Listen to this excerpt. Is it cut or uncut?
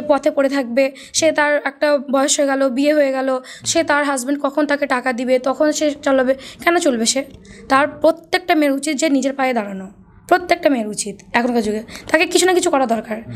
uncut